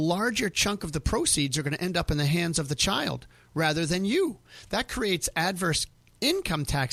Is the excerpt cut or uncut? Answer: uncut